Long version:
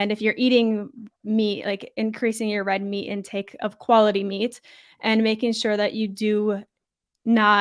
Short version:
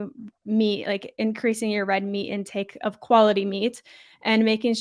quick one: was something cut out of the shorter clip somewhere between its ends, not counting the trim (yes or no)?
no